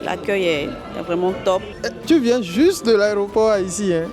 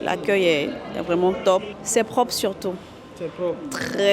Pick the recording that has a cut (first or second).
first